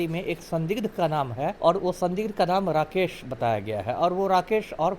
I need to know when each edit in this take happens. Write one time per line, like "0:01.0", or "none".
0:01.6